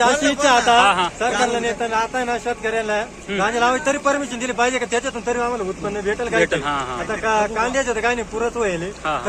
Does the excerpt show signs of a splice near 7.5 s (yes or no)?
no